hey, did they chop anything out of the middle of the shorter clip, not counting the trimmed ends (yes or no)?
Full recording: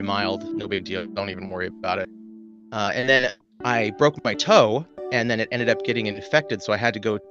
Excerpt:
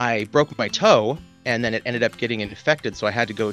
no